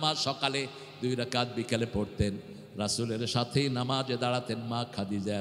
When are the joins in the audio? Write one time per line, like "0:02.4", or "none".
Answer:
none